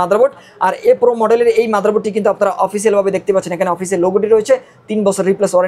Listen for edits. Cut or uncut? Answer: uncut